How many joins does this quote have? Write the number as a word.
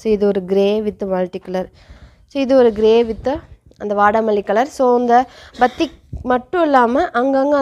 zero